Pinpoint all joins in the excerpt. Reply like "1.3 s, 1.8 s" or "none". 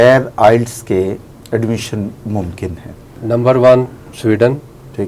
3.2 s, 4.0 s